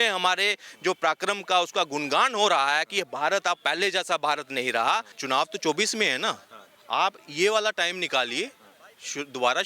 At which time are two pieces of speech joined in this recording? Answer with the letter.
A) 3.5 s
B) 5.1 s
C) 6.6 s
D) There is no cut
B